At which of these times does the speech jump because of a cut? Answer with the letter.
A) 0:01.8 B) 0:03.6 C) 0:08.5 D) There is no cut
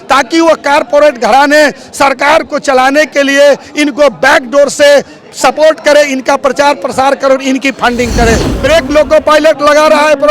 C